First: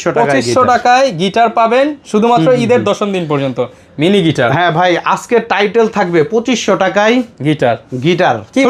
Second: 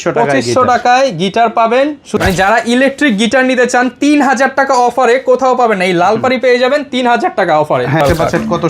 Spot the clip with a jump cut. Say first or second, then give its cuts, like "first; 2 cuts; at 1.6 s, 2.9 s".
second; 2 cuts; at 2.1 s, 8.0 s